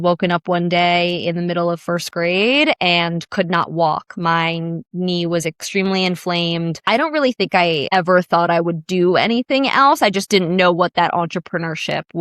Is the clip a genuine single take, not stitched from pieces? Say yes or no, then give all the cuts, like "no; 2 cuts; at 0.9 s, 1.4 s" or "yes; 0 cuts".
no; 1 cut; at 6.8 s